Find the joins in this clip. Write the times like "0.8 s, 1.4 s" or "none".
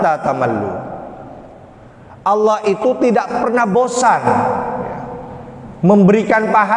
none